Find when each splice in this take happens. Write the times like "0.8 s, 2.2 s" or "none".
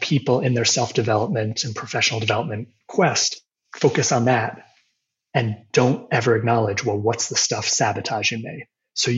none